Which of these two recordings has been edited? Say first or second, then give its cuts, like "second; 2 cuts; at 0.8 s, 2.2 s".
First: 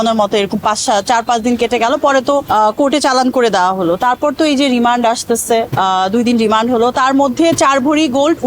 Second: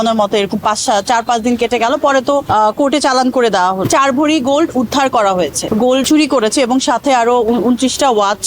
second; 2 cuts; at 3.9 s, 6.0 s